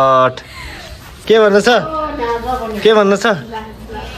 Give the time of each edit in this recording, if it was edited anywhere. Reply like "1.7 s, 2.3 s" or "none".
1.1 s